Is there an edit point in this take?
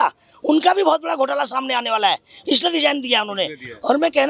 no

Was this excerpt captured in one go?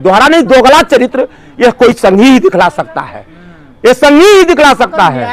yes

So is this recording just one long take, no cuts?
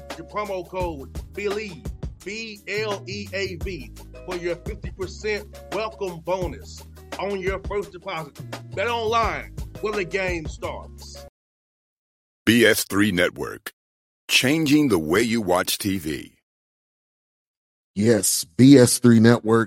no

